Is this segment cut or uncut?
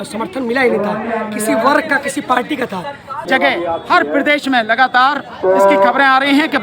cut